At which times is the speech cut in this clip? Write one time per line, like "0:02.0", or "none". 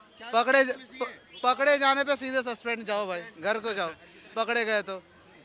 none